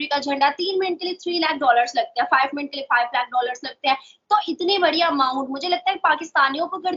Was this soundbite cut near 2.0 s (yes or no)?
no